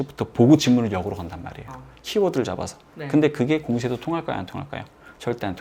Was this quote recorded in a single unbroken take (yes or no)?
yes